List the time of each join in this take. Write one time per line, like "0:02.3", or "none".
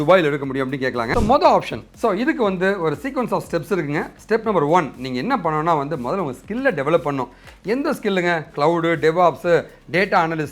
0:01.1

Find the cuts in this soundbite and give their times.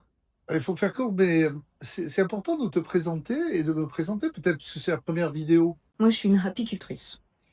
0:05.9

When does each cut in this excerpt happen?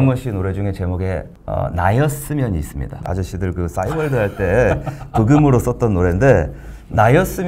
0:01.4
0:03.0

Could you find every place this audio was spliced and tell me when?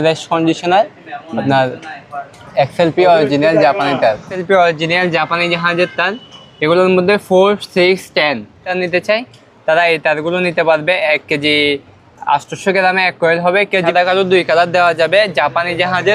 0:04.3
0:08.7
0:13.9

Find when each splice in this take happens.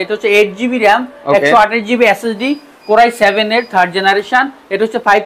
none

